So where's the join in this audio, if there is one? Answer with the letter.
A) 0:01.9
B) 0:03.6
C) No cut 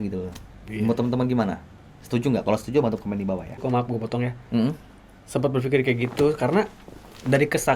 B